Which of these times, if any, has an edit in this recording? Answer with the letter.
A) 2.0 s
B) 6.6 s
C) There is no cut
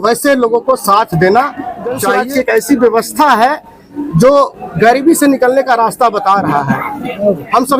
A